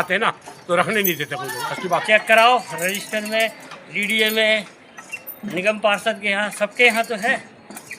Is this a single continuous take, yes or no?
no